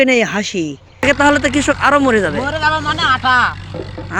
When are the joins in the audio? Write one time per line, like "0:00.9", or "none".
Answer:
0:01.0